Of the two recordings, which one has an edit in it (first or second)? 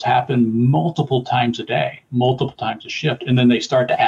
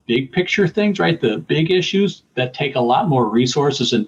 second